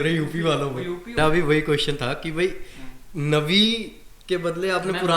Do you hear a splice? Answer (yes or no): yes